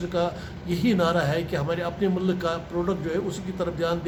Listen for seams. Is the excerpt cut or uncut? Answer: uncut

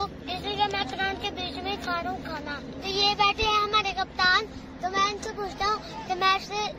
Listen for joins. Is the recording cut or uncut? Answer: uncut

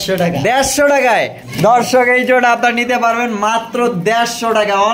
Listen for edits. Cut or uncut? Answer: uncut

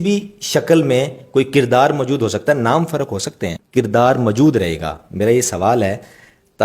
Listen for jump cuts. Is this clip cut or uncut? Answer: cut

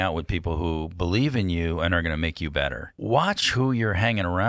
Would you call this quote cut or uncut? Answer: cut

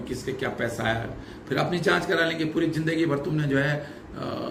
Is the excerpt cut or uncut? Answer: uncut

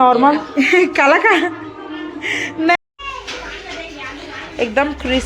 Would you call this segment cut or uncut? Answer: cut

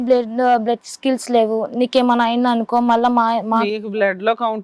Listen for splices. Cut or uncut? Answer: uncut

